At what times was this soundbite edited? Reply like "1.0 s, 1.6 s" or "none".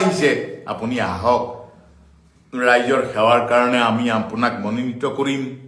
none